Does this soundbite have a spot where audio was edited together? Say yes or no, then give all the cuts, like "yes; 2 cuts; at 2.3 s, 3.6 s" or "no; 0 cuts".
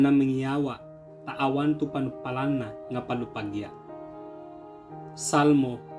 yes; 2 cuts; at 3.8 s, 5.2 s